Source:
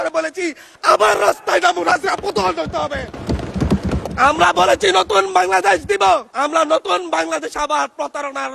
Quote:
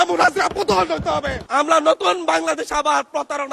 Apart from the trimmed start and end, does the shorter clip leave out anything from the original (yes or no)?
yes